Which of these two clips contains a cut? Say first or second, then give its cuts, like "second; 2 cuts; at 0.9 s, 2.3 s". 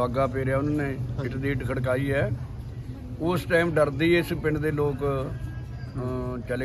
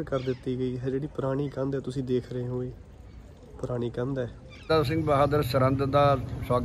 second; 1 cut; at 4.7 s